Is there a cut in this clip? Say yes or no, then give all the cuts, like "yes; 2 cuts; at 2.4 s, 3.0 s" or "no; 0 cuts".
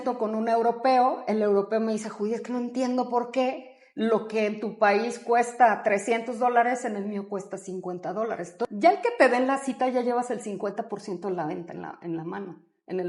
yes; 1 cut; at 8.5 s